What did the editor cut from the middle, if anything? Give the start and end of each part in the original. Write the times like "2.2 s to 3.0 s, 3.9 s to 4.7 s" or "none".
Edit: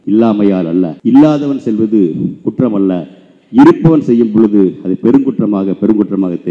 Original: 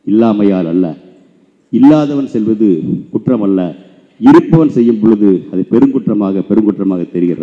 0.9 s to 1.6 s